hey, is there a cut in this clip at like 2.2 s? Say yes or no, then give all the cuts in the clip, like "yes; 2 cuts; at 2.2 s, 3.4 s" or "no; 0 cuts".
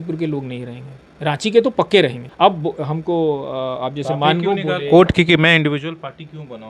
yes; 1 cut; at 2.2 s